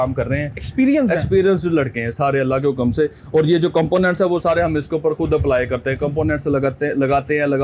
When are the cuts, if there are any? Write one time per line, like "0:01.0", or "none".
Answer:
none